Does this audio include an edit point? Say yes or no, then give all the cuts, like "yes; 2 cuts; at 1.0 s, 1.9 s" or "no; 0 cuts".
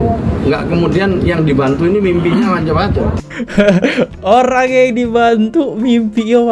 no; 0 cuts